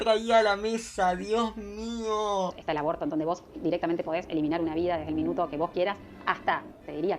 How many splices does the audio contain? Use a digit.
1